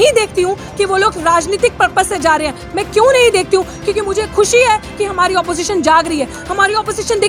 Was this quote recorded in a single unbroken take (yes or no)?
yes